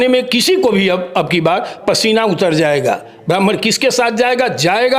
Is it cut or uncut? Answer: uncut